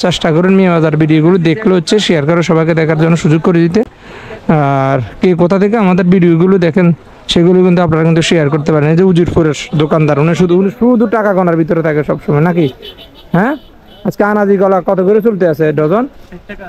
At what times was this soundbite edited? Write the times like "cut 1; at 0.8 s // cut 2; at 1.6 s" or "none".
none